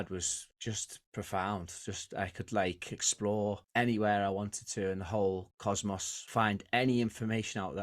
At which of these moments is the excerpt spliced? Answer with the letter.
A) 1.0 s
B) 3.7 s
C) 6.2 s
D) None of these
C